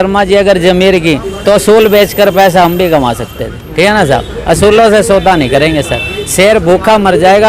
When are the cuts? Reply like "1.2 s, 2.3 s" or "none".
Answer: none